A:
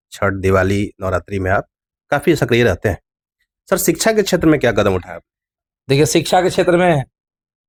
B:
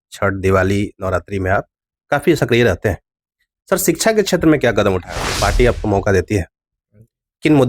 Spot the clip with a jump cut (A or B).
B